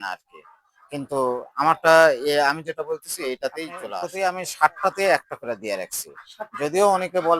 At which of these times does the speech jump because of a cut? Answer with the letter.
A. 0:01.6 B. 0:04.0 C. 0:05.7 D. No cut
B